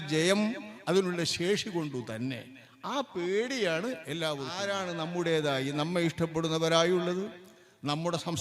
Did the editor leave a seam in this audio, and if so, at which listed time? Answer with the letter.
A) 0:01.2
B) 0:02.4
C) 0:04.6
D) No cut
C